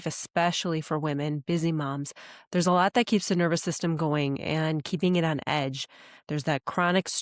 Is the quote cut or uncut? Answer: uncut